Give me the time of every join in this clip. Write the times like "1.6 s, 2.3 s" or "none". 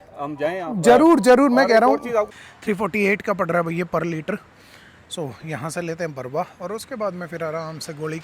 2.4 s